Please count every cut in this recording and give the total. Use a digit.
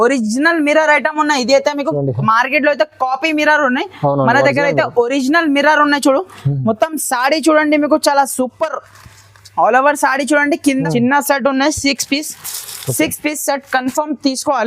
1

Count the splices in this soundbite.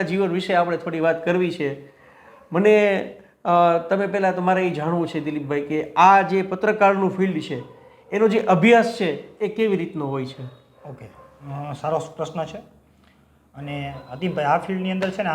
0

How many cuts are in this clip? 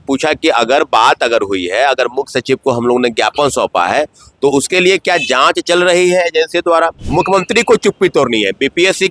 1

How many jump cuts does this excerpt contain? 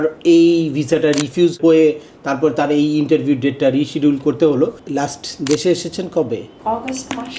3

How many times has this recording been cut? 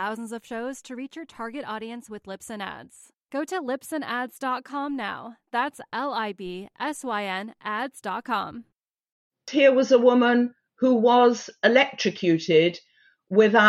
1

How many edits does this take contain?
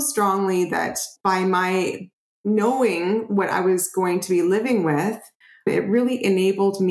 2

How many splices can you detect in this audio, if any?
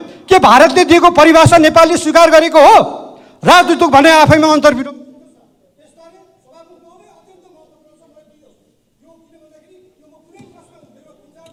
0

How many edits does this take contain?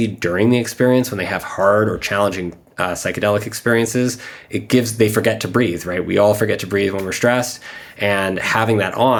0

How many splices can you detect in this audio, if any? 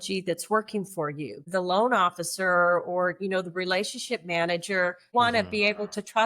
2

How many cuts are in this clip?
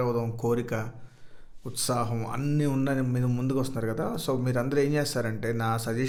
0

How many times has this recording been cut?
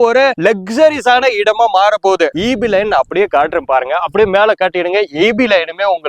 1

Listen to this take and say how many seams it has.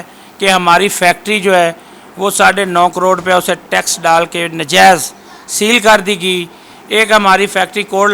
0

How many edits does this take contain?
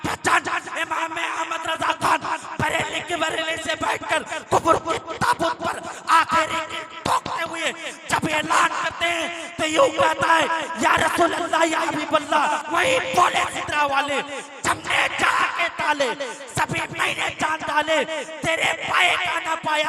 1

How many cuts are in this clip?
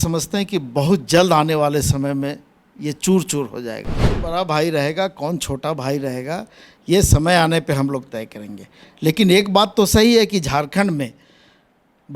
1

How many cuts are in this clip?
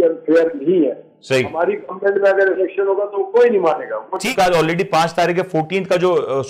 1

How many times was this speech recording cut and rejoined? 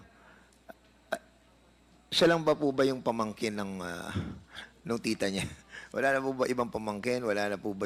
0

